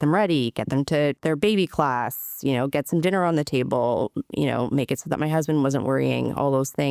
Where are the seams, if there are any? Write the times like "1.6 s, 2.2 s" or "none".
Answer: 1.2 s